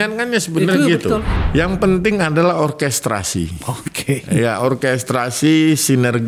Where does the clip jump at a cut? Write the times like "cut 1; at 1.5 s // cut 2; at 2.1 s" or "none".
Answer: cut 1; at 1.3 s